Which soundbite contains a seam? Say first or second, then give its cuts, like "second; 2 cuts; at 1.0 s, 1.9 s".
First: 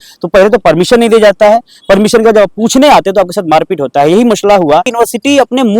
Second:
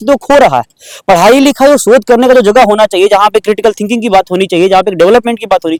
first; 1 cut; at 4.9 s